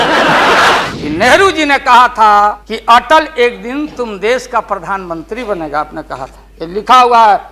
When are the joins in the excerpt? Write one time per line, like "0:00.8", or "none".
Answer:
0:00.8
0:02.7
0:06.4